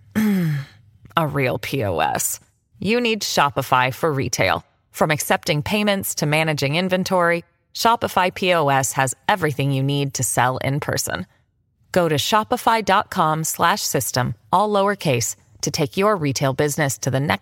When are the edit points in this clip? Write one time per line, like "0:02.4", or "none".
none